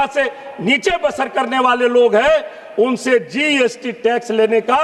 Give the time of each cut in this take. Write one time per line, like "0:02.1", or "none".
none